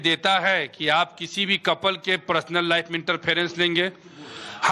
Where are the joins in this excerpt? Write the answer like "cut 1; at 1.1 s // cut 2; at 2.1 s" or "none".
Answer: cut 1; at 3.6 s